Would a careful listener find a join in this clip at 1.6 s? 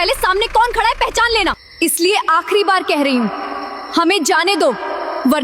yes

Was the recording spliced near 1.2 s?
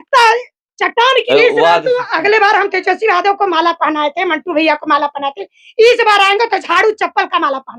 yes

